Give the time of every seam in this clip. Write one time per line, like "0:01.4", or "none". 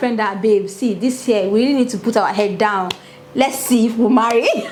none

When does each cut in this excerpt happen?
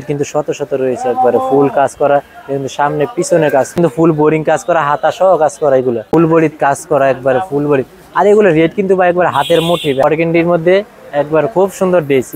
0:03.8
0:06.1
0:10.0

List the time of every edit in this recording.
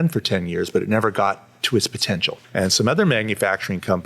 0:02.4

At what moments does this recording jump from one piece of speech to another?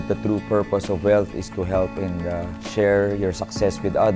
0:02.6

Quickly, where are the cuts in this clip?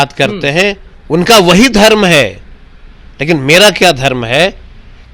none

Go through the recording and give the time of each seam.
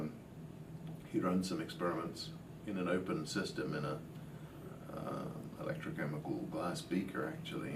0:01.0

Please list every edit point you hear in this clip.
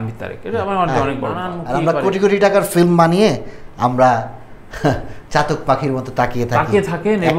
0:01.5

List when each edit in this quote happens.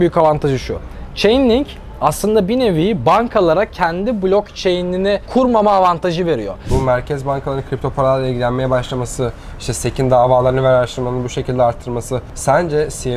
0:06.6
0:12.2

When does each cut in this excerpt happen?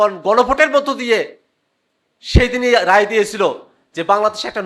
none

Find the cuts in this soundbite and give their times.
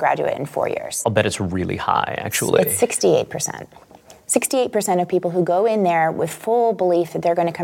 0:00.9

